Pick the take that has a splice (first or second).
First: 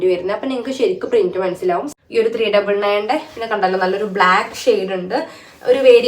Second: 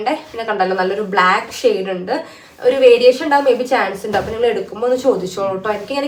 first